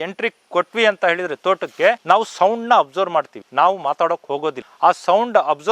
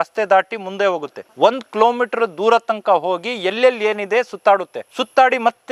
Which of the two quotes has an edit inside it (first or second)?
first